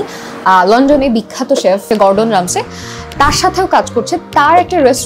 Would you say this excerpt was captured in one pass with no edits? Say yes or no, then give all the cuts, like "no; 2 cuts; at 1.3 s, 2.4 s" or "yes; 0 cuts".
no; 1 cut; at 1.8 s